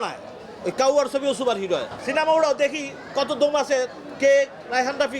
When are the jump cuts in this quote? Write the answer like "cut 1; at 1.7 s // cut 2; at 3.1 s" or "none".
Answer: cut 1; at 2.0 s